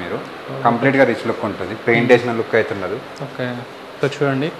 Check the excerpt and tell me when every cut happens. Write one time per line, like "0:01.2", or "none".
none